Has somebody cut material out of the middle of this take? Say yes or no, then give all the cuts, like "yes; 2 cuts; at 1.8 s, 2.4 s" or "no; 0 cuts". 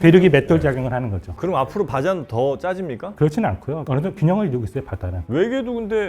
yes; 2 cuts; at 1.3 s, 5.2 s